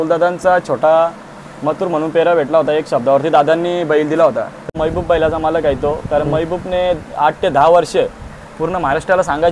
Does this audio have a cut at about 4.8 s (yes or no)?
yes